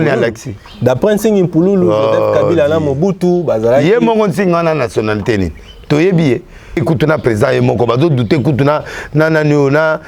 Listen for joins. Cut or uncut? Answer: cut